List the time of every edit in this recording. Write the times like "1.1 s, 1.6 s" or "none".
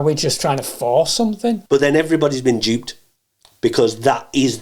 1.6 s

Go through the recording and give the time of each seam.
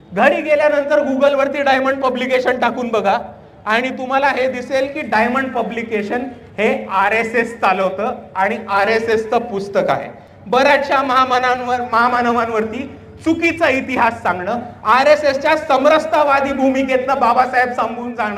none

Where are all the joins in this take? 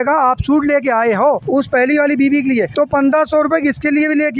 1.4 s, 2.7 s

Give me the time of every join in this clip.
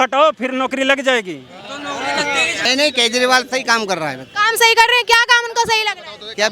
2.7 s

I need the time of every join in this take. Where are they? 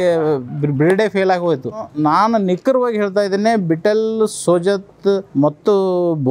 1.9 s, 5.3 s

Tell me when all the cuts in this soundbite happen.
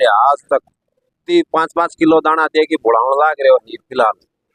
1.2 s

